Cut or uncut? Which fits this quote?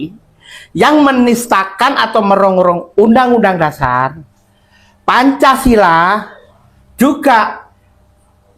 uncut